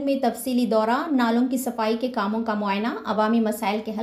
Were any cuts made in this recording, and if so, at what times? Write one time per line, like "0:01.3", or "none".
none